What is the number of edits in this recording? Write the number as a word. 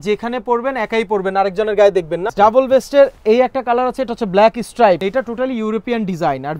two